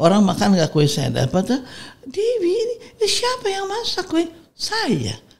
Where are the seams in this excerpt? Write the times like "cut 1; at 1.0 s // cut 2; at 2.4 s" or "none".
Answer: none

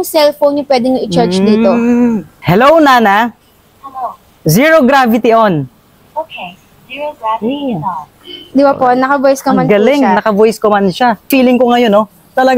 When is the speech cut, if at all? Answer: cut 1; at 2.3 s // cut 2; at 4.2 s // cut 3; at 11.3 s

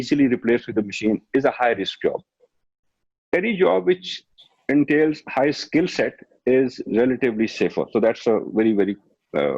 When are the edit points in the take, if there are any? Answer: none

